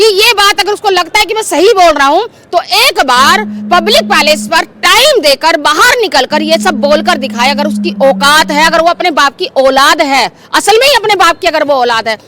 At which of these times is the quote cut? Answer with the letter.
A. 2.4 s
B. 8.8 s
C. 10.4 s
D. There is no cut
D